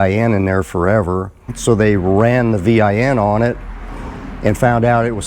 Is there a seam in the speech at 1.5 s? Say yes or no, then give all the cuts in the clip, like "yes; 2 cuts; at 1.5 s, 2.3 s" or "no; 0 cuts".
yes; 1 cut; at 1.5 s